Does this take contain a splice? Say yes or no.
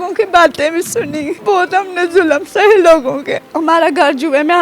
yes